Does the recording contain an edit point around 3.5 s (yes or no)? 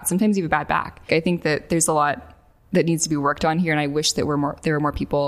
no